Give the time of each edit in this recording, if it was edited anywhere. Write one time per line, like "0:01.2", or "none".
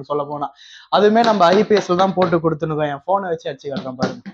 none

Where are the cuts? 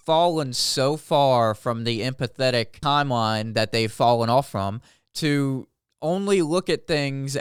none

